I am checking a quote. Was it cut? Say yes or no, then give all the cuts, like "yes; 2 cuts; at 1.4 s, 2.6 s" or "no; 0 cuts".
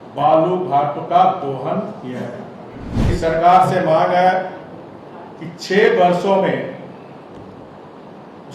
yes; 1 cut; at 3.1 s